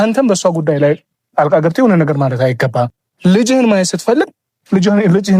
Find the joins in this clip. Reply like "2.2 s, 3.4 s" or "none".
3.0 s